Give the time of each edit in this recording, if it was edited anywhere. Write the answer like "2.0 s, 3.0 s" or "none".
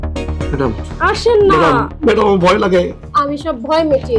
none